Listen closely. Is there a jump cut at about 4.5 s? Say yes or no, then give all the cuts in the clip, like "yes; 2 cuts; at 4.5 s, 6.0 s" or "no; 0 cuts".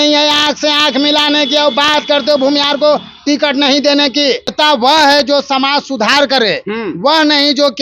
yes; 1 cut; at 4.5 s